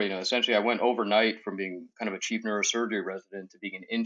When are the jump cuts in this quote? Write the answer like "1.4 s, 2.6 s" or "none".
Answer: none